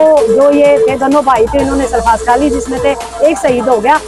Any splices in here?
no; 0 cuts

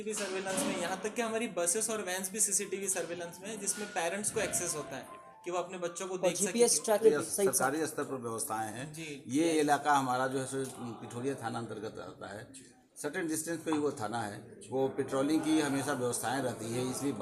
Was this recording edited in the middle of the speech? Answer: yes; 1 cut; at 7.0 s

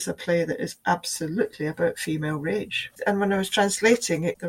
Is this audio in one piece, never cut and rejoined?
no; 1 cut; at 2.9 s

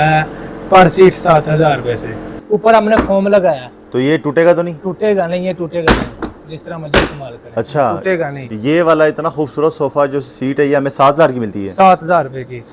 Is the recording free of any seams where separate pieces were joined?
no; 2 cuts; at 2.3 s, 8.4 s

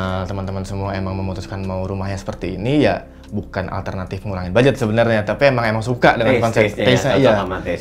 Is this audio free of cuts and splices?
yes; 0 cuts

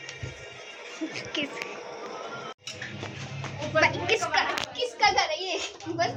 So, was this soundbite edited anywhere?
no; 0 cuts

